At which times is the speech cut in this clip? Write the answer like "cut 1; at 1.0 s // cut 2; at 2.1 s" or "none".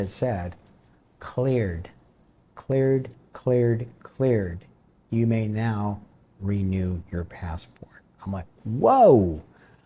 none